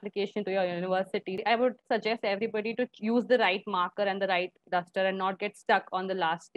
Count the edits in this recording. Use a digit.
1